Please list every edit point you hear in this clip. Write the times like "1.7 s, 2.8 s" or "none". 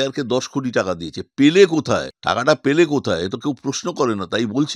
2.1 s